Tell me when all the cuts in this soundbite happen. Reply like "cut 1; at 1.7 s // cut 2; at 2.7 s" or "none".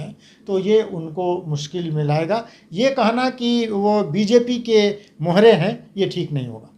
none

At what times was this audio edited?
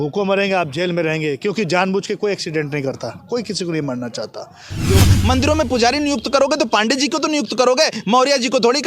cut 1; at 5.0 s

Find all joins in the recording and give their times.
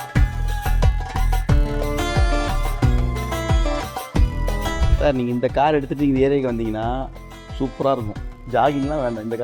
cut 1; at 4.9 s

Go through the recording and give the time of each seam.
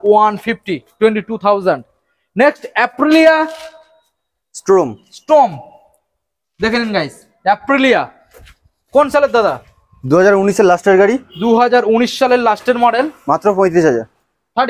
none

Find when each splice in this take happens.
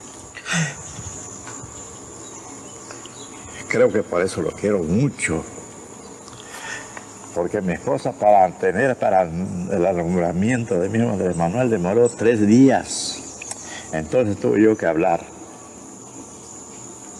none

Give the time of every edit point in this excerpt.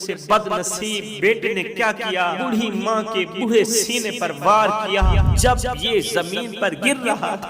cut 1; at 1.1 s // cut 2; at 2.4 s // cut 3; at 5.3 s

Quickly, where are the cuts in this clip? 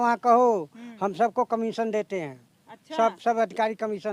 none

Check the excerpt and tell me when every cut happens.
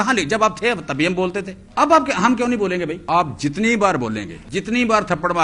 cut 1; at 1.6 s // cut 2; at 3.0 s // cut 3; at 4.3 s

